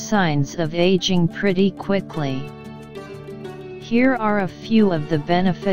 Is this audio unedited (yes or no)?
yes